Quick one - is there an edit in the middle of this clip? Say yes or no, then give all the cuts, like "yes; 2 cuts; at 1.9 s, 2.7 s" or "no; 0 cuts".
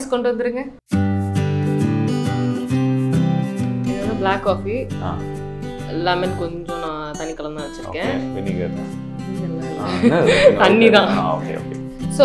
no; 0 cuts